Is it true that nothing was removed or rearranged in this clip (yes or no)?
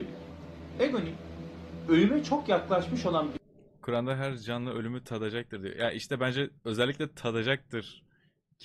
yes